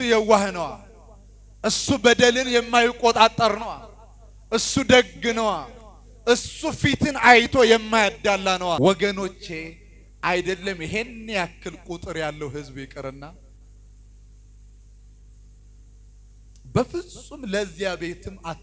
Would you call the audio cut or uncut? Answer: cut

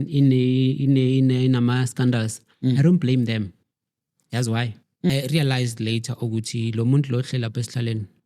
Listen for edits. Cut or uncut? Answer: cut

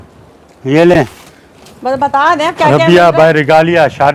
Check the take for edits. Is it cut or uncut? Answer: uncut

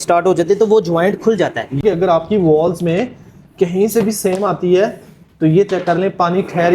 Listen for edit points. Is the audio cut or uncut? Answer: cut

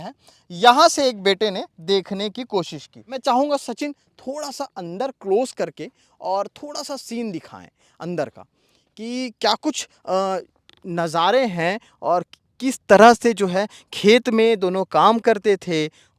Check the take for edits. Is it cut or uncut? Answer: cut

